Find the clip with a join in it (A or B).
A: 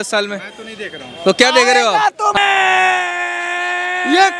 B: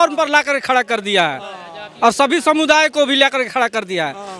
A